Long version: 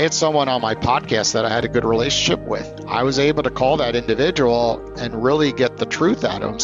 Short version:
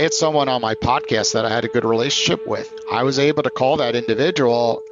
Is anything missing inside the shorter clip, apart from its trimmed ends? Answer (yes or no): no